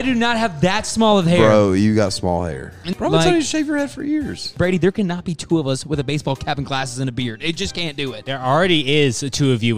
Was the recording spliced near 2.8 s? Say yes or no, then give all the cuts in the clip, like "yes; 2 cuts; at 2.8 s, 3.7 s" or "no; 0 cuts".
yes; 3 cuts; at 2.8 s, 4.4 s, 8.2 s